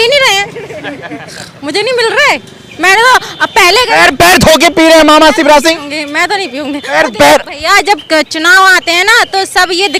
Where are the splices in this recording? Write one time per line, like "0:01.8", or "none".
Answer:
none